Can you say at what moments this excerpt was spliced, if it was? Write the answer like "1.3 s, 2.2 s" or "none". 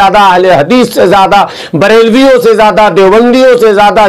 none